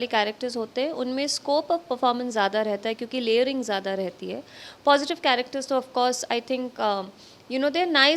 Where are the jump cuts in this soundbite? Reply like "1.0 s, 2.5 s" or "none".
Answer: none